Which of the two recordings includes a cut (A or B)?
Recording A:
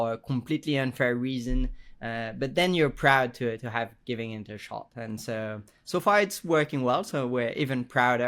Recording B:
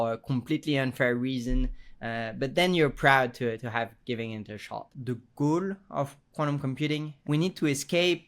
B